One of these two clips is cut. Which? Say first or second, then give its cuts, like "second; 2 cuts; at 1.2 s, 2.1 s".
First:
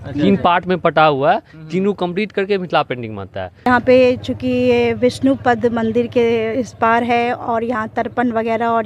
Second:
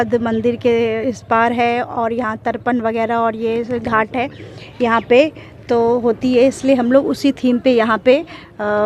first; 1 cut; at 3.7 s